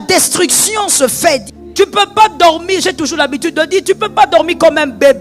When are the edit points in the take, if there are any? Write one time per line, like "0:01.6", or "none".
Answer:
0:01.5